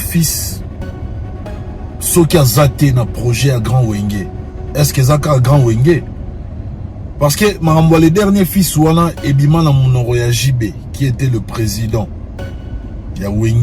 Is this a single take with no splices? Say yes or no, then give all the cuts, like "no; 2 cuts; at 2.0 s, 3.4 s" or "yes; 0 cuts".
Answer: no; 1 cut; at 12.6 s